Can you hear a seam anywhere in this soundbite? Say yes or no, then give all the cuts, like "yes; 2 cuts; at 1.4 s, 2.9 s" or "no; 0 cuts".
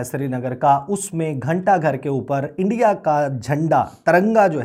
no; 0 cuts